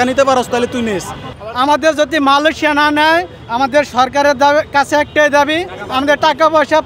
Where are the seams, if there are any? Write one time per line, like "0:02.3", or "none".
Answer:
0:01.4